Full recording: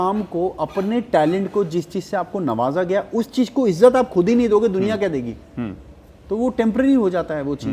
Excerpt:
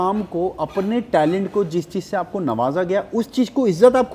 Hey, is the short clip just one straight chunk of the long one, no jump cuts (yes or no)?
yes